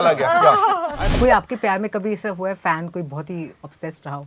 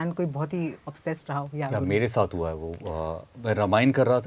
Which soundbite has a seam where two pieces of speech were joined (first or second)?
first